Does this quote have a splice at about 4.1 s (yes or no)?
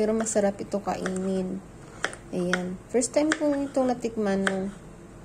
no